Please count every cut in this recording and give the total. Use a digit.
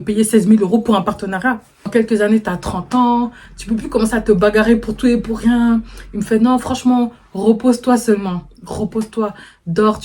1